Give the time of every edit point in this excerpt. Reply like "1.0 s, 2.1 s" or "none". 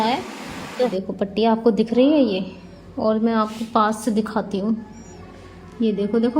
0.9 s